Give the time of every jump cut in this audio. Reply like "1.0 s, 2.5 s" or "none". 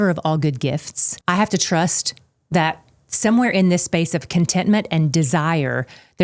1.1 s